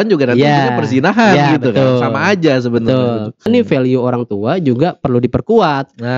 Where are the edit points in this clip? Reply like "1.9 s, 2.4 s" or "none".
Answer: 3.5 s